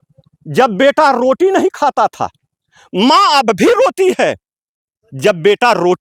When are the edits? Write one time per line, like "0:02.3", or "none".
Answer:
none